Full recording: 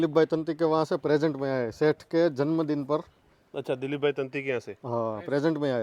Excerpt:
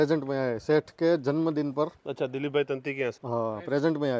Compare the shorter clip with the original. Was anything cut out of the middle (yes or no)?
yes